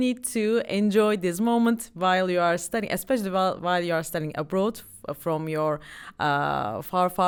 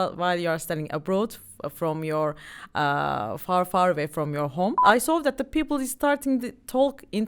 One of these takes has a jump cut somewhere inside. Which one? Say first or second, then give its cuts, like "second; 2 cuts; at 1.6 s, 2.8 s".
second; 1 cut; at 4.8 s